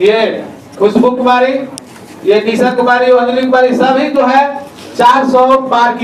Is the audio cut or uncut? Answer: cut